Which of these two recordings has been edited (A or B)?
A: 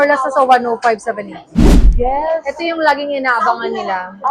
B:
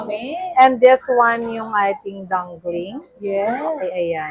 A